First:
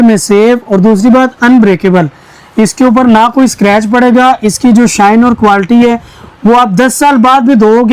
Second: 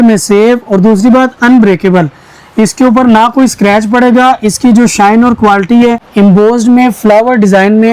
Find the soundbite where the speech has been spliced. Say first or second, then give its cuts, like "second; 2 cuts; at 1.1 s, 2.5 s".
second; 1 cut; at 6.0 s